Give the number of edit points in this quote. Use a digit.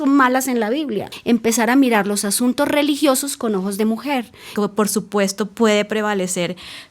2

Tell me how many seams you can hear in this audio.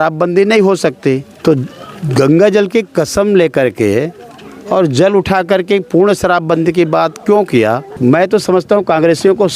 2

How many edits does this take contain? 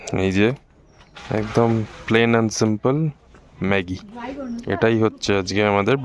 0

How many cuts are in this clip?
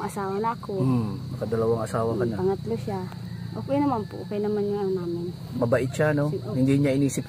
0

